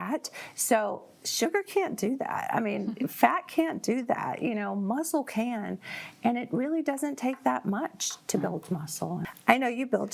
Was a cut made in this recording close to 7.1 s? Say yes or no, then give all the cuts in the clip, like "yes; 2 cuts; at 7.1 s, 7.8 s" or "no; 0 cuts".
no; 1 cut; at 9.2 s